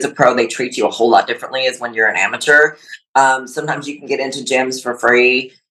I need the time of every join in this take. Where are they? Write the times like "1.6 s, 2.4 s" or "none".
none